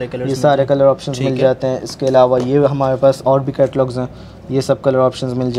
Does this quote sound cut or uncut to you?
uncut